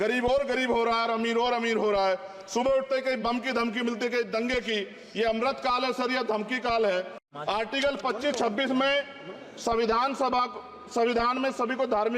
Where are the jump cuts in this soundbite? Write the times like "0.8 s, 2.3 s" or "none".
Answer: 7.2 s